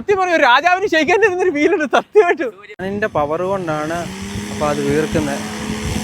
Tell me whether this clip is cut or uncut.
cut